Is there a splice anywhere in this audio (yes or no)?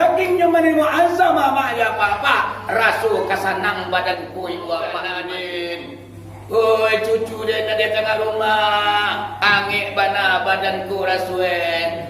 yes